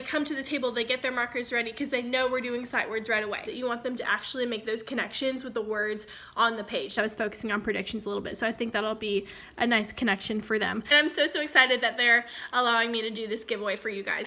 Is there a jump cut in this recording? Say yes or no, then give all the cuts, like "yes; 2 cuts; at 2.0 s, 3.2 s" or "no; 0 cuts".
yes; 3 cuts; at 3.4 s, 6.9 s, 10.9 s